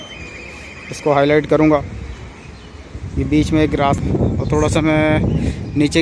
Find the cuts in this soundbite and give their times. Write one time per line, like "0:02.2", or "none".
0:04.0